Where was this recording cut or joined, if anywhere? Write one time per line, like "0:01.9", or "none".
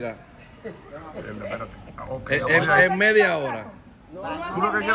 none